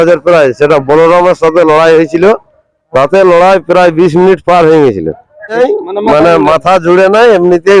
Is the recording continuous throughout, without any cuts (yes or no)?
no